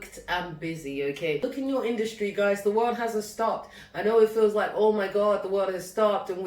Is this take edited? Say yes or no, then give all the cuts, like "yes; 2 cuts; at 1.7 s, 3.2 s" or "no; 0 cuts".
yes; 1 cut; at 1.4 s